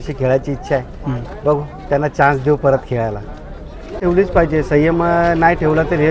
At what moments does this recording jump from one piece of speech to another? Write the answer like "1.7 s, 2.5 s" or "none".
4.0 s